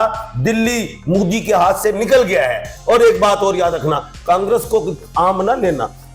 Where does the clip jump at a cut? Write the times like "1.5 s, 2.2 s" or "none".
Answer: 2.7 s